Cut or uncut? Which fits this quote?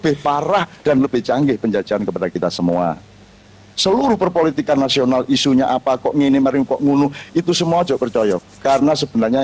uncut